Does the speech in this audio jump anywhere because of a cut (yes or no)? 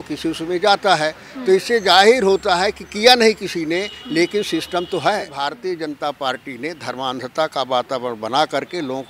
yes